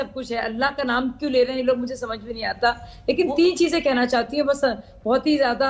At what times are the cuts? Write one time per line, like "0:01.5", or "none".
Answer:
none